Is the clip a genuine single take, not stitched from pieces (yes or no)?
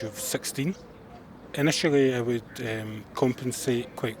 no